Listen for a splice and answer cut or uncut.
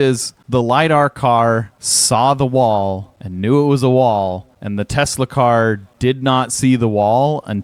uncut